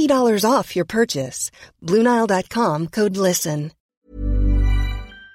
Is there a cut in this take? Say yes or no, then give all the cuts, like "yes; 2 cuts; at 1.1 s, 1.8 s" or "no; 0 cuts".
yes; 1 cut; at 3.8 s